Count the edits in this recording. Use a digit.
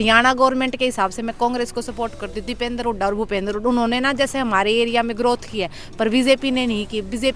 0